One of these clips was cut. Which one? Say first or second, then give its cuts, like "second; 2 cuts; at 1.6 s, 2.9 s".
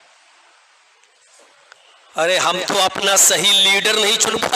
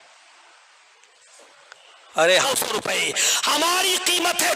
second; 1 cut; at 2.4 s